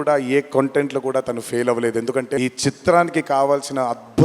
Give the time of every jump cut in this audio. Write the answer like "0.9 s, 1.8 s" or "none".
2.4 s